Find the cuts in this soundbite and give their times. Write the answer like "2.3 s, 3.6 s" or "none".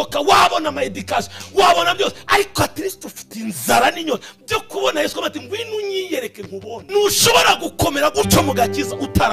6.8 s